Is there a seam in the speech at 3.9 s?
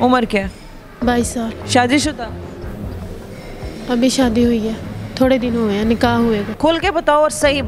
no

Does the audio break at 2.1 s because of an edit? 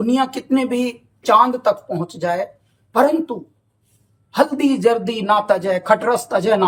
no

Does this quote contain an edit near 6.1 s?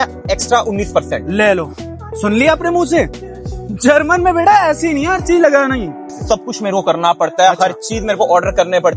yes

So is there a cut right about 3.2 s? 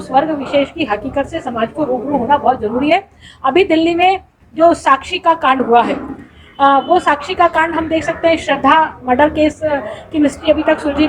no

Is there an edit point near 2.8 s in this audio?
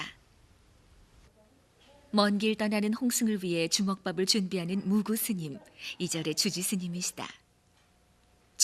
yes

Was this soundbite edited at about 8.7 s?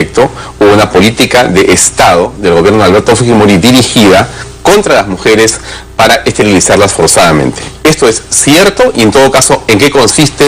no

